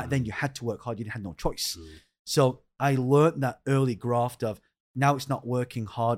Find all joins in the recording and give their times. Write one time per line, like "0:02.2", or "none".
none

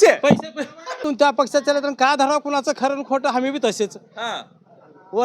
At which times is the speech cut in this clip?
0:01.1

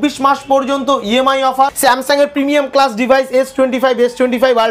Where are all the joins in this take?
0:01.7

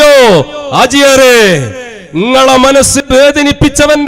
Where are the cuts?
0:03.0

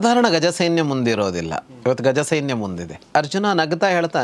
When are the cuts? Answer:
0:03.0

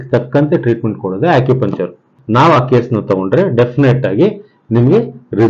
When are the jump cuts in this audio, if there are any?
0:02.0

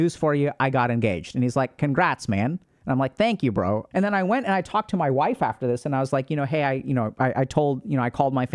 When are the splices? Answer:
0:03.9
0:07.1

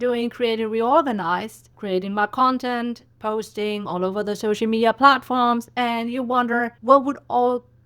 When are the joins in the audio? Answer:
0:06.7

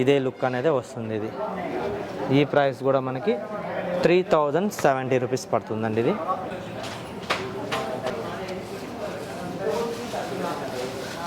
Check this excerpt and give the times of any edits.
none

